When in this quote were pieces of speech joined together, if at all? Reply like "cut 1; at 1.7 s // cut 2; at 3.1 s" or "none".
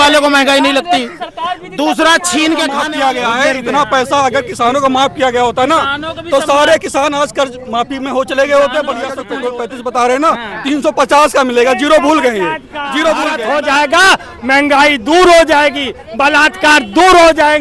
cut 1; at 2.8 s // cut 2; at 9.2 s // cut 3; at 13.4 s